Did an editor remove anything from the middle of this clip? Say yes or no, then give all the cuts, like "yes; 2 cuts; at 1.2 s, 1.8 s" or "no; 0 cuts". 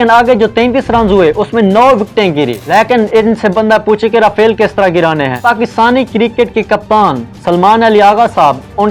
yes; 2 cuts; at 2.6 s, 5.4 s